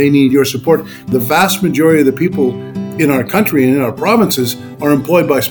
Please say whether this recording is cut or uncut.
uncut